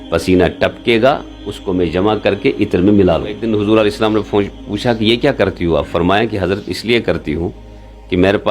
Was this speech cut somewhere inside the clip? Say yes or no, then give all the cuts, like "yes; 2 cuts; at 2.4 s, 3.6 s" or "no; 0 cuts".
yes; 1 cut; at 3.4 s